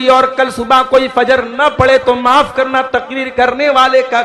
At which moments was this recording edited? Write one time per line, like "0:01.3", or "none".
0:03.2

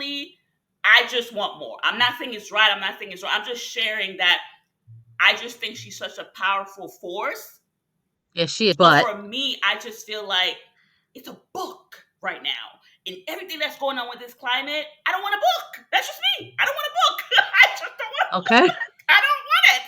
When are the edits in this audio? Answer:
none

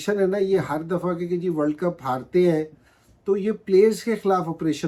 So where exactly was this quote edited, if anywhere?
none

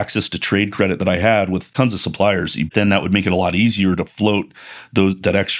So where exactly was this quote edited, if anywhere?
0:01.7
0:02.7

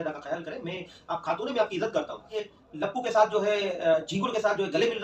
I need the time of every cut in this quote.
0:02.4

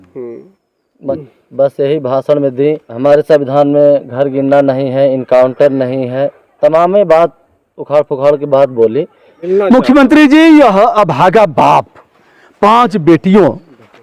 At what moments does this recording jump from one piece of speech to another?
0:01.1
0:02.9
0:09.4

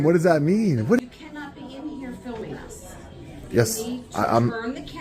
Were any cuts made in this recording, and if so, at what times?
0:01.0

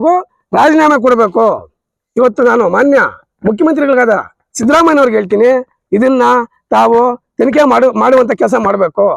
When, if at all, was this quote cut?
none

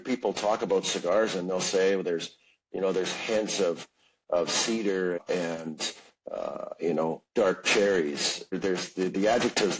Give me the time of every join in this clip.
0:05.2
0:08.6

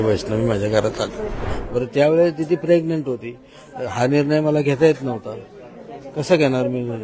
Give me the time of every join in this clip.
0:01.4

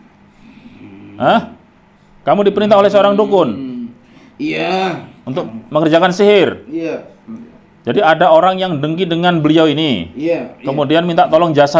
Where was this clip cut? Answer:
0:05.4

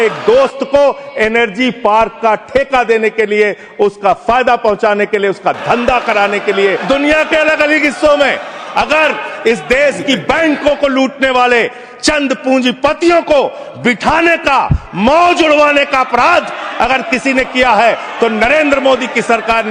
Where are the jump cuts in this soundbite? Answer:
0:06.8

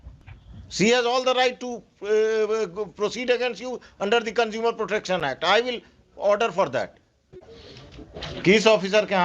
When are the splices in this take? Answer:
0:07.3

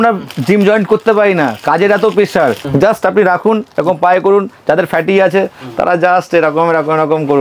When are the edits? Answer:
0:02.6

